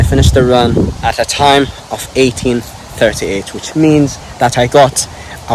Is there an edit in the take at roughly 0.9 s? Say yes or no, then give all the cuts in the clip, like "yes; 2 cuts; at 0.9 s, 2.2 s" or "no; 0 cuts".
yes; 1 cut; at 0.9 s